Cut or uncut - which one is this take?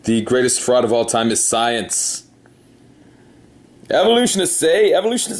cut